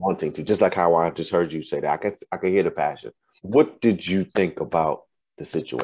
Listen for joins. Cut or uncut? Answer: cut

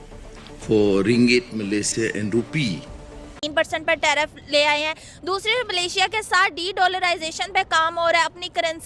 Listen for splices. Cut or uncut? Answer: cut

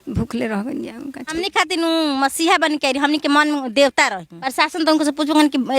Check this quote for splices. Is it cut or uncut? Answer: cut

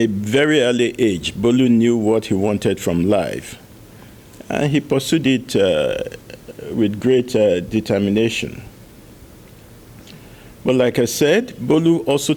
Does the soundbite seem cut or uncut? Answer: uncut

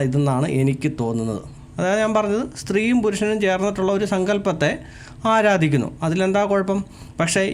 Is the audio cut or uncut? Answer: cut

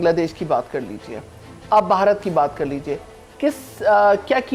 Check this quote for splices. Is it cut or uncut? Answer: uncut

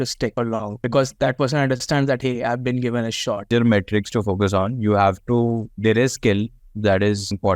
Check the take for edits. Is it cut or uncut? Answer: cut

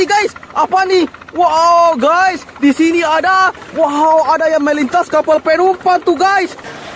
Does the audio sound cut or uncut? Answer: uncut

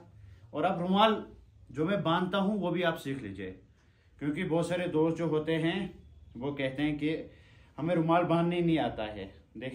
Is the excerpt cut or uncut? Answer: uncut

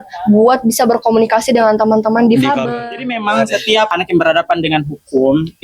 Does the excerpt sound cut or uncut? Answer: cut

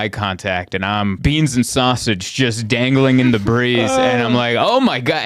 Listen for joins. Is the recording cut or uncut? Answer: cut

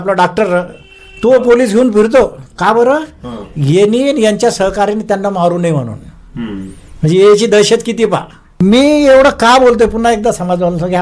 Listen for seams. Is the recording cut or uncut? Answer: cut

